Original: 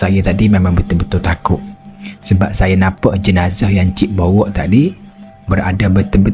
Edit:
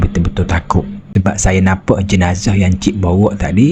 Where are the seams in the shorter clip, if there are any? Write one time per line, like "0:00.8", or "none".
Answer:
0:01.0